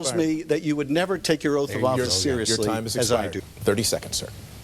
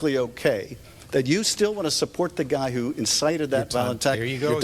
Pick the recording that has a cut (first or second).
first